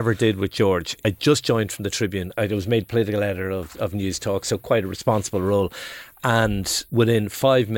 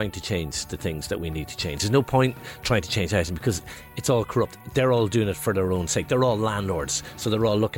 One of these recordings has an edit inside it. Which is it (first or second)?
first